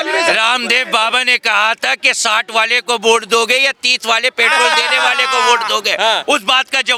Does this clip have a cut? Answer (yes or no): no